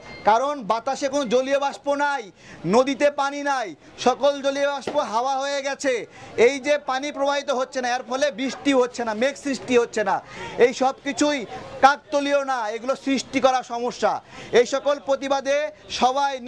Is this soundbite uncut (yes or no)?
yes